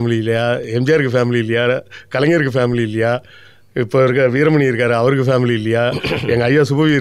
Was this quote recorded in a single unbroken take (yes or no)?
yes